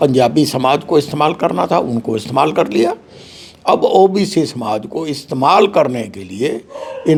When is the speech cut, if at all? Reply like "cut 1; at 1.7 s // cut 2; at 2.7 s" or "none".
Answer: none